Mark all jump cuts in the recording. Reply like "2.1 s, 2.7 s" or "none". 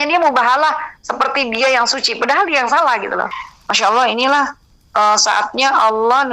3.3 s